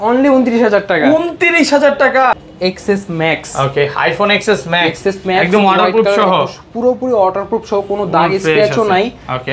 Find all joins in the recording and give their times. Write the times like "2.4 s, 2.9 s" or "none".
2.3 s

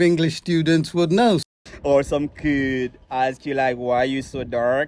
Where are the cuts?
1.4 s

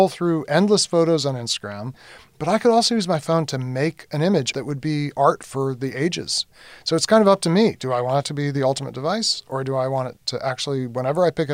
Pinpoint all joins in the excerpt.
2.1 s, 4.5 s, 6.5 s

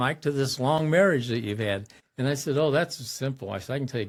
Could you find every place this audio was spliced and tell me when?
none

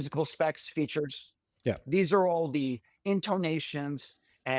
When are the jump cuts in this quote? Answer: none

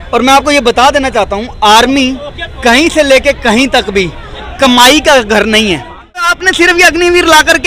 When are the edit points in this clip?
6.3 s

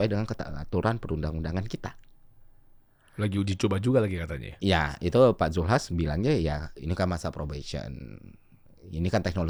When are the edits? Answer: none

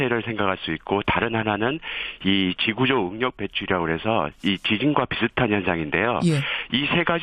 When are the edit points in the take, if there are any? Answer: 6.0 s

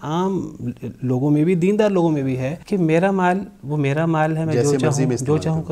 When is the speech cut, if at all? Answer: 2.5 s

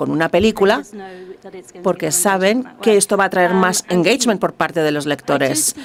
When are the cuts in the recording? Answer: none

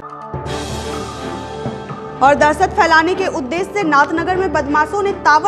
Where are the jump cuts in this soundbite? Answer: 2.0 s

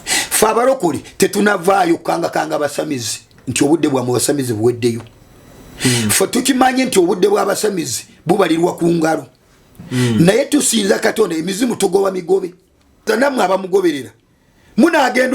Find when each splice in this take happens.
13.1 s

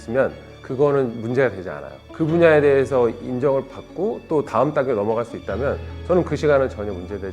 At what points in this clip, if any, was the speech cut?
2.0 s

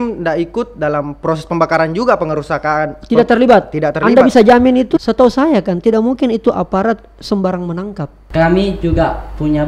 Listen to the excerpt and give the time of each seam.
5.0 s, 8.2 s

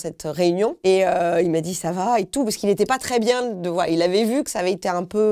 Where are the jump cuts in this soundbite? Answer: none

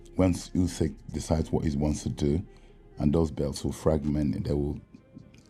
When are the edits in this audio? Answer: none

